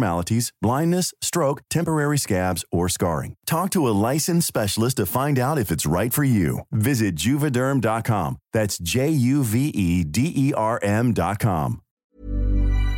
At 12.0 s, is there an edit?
yes; 1 cut; at 12.0 s

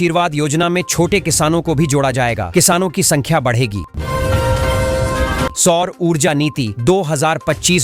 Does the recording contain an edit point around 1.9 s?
no; 2 cuts; at 4.0 s, 5.5 s

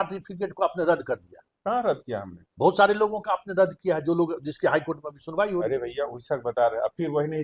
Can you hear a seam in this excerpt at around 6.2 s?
no; 0 cuts

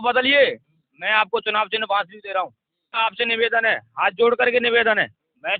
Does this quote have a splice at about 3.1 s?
yes; 1 cut; at 3.1 s

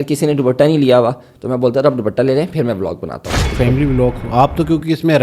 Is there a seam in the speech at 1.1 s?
no; 1 cut; at 3.5 s

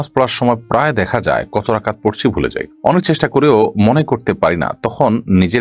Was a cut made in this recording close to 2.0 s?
no; 0 cuts

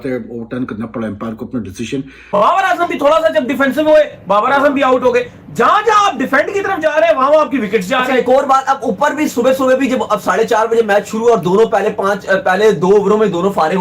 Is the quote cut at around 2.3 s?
yes; 1 cut; at 2.3 s

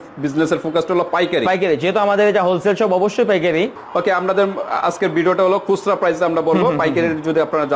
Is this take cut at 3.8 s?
yes; 1 cut; at 3.8 s

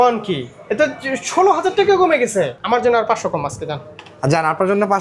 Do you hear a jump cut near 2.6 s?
yes; 1 cut; at 2.6 s

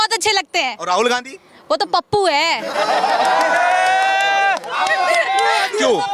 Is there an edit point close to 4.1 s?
no; 0 cuts

